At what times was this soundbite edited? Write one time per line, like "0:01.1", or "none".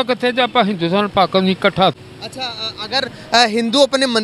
0:01.9